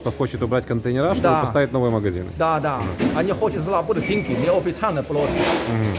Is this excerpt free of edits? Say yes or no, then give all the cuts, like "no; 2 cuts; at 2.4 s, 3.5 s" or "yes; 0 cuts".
yes; 0 cuts